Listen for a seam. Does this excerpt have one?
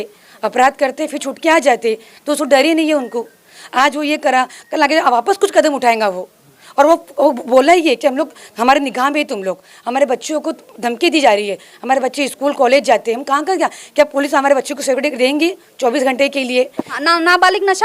yes; 1 cut; at 16.8 s

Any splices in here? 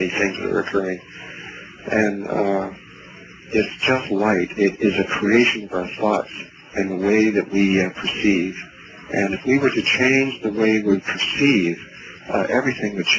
yes; 1 cut; at 5.6 s

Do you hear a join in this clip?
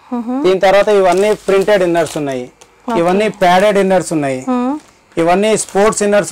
no; 0 cuts

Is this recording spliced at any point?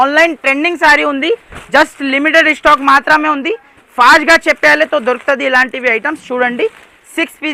no; 0 cuts

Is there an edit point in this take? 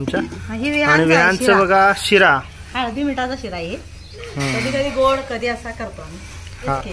no; 0 cuts

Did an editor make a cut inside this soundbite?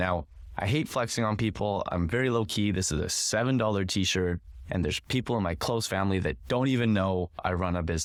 no; 0 cuts

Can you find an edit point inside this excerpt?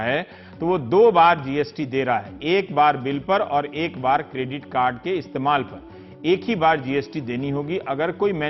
no; 0 cuts

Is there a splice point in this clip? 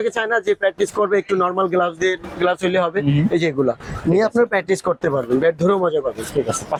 no; 0 cuts

